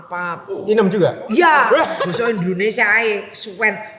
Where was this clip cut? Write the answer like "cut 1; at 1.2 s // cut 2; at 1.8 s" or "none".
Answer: cut 1; at 2.0 s